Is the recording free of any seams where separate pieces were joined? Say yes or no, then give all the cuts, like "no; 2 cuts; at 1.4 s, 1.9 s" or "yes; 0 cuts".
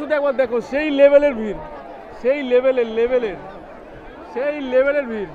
yes; 0 cuts